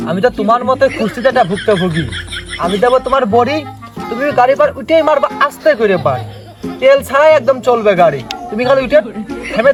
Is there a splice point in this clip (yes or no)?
no